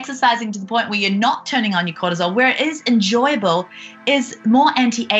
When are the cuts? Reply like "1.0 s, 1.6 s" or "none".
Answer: none